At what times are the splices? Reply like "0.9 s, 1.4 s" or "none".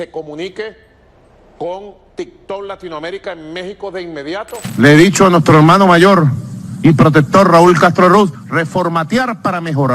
4.6 s, 8.4 s